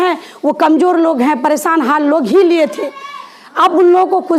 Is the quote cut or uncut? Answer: uncut